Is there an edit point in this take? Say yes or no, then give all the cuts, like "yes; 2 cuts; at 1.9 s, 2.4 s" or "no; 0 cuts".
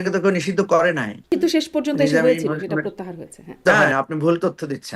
yes; 2 cuts; at 1.3 s, 3.6 s